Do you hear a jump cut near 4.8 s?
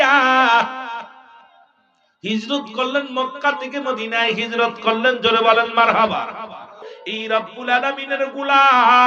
no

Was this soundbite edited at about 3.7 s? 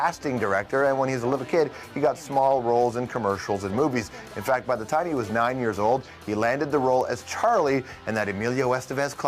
yes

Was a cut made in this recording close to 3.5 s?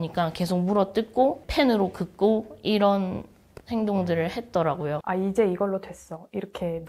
no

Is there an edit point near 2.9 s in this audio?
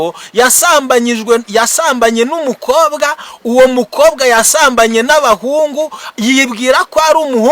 no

